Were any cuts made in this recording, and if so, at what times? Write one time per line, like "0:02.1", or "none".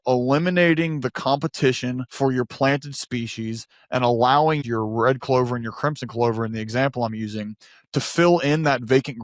0:02.1
0:04.6